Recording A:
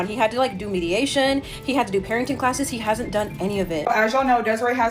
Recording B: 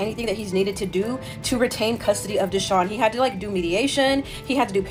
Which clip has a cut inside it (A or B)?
A